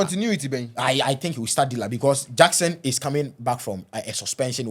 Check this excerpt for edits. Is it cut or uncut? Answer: uncut